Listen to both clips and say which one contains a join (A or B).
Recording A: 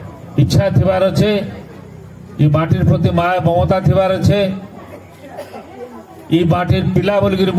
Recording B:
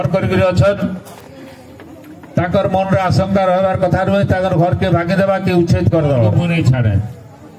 B